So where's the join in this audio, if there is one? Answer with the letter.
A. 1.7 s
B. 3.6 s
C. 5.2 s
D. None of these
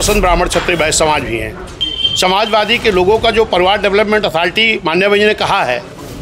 A